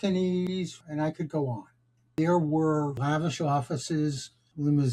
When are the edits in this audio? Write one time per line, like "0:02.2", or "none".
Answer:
0:02.0
0:03.0

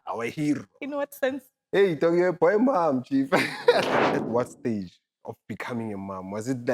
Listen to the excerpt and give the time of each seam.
0:04.1

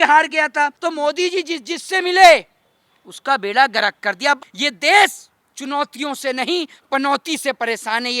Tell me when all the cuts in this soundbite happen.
0:00.8
0:04.4

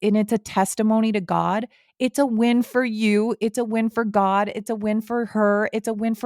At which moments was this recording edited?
none

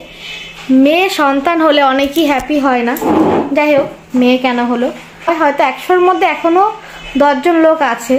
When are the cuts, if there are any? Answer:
0:05.3

